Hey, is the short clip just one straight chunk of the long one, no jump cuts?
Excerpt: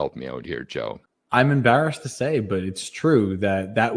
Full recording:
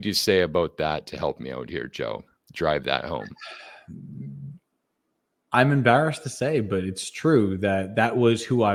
no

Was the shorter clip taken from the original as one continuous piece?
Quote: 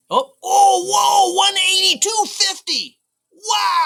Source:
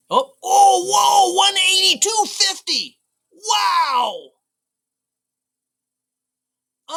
yes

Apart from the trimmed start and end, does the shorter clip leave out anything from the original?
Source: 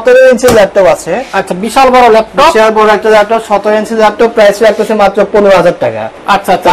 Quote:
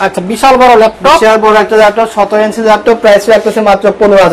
no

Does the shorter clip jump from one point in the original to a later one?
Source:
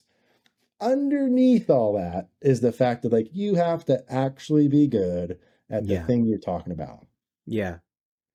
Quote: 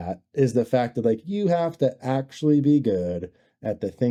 no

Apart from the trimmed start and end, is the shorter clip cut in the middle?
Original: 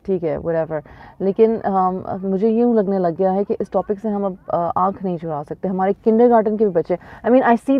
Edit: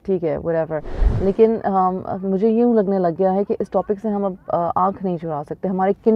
no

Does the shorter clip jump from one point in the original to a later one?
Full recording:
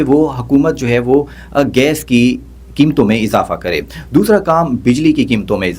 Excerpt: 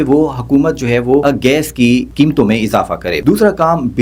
yes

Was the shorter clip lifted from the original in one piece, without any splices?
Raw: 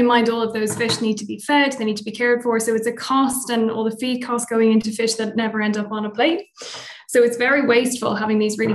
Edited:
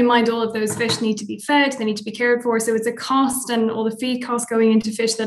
yes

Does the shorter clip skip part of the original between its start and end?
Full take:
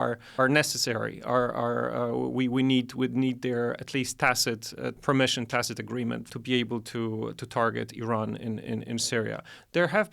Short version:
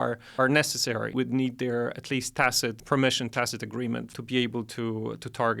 yes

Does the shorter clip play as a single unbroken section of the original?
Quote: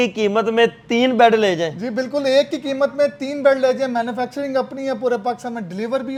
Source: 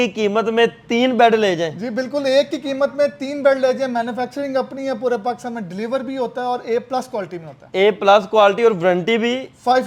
yes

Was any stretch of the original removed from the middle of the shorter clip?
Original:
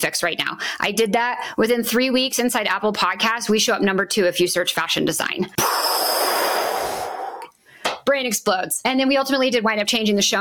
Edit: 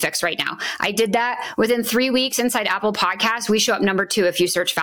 no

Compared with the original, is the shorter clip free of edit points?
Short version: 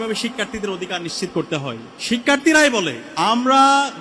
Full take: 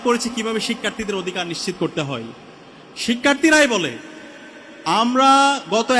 no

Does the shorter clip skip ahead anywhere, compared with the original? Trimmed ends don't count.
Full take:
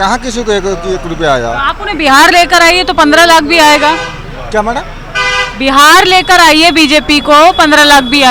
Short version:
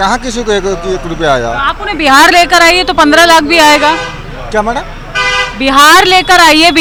no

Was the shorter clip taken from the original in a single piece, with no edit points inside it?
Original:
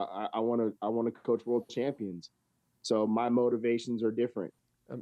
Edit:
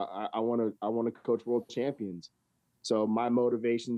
yes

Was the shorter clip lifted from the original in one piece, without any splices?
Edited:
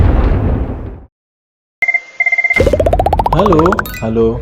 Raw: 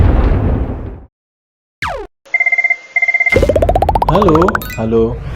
no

